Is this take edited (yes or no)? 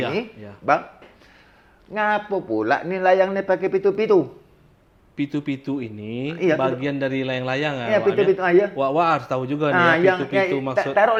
no